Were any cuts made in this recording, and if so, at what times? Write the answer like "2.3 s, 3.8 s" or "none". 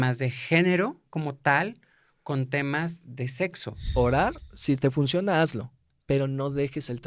3.8 s